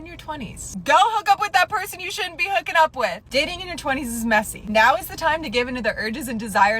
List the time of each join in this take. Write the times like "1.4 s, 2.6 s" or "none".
3.7 s